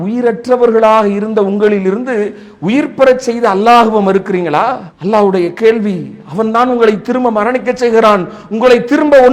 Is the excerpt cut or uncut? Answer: uncut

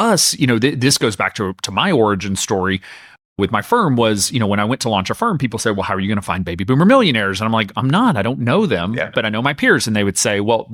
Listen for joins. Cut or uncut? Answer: uncut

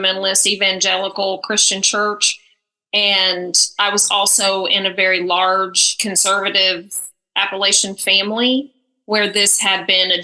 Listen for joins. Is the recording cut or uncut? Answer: uncut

